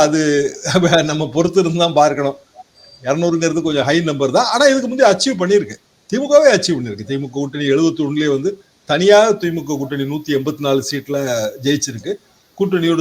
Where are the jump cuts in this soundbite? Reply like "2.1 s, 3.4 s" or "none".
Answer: none